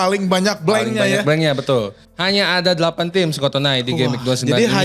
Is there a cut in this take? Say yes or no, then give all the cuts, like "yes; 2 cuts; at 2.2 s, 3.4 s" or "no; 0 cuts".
yes; 1 cut; at 2.0 s